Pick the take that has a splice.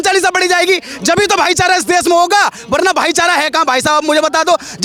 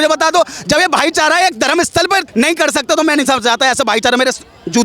second; 1 cut; at 2.3 s

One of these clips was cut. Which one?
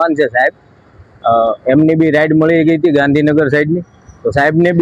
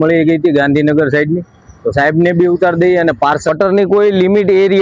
second; 1 cut; at 3.5 s

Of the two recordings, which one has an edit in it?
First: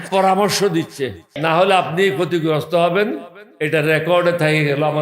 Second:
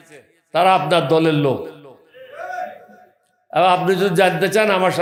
first; 1 cut; at 1.3 s

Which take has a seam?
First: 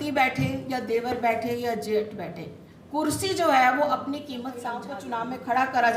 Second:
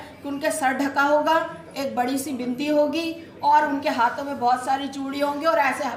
first; 1 cut; at 4.8 s

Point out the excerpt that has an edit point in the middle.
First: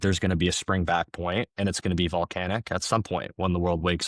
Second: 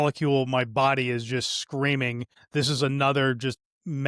second; 1 cut; at 2.3 s

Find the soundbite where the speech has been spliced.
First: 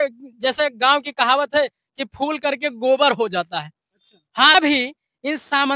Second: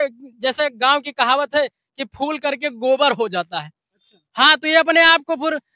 first; 1 cut; at 4.5 s

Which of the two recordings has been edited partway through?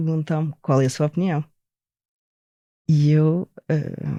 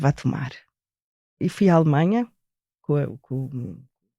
second; 2 cuts; at 1.3 s, 2.8 s

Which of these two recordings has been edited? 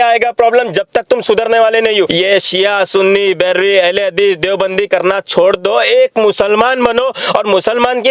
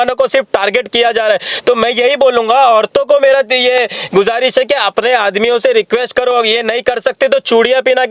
first; 1 cut; at 2.1 s

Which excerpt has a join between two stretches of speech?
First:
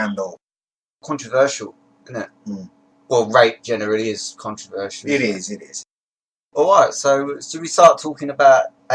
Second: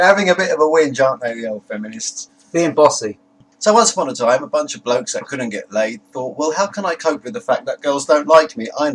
second; 1 cut; at 4.7 s

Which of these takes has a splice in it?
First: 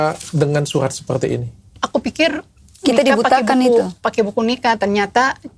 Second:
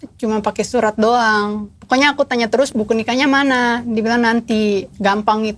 second; 2 cuts; at 1.7 s, 2.7 s

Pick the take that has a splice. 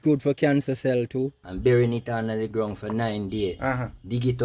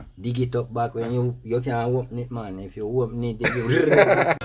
first; 1 cut; at 1.4 s

